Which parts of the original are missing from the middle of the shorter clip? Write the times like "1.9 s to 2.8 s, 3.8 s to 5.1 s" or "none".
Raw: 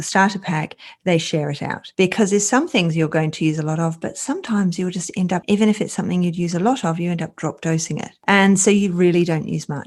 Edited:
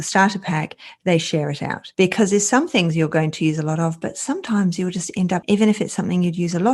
none